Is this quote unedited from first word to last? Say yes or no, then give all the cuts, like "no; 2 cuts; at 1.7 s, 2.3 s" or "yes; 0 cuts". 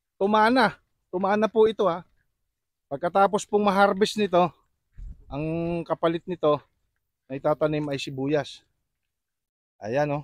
yes; 0 cuts